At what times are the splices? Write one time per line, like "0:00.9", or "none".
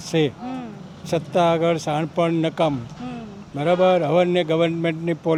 none